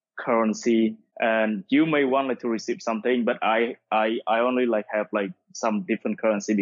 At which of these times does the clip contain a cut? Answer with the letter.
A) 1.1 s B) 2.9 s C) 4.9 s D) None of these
A